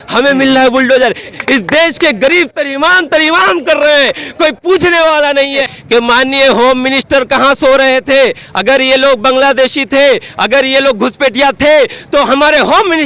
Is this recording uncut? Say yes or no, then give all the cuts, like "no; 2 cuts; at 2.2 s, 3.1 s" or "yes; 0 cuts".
no; 2 cuts; at 1.3 s, 5.7 s